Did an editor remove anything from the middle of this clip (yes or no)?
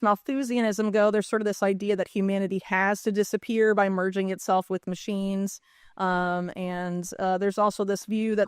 no